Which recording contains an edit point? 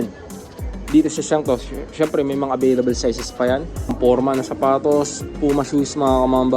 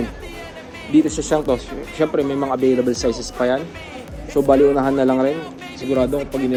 first; 1 cut; at 3.8 s

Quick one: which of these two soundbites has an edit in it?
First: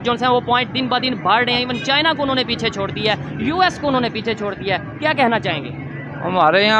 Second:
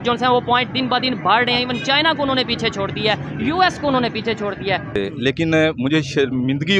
second; 1 cut; at 4.9 s

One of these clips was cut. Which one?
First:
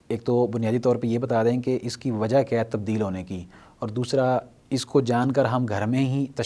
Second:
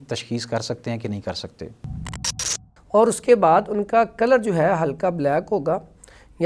second; 1 cut; at 2.2 s

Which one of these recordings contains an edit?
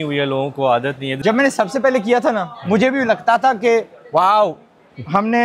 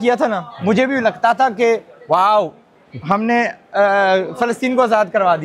first; 1 cut; at 1.1 s

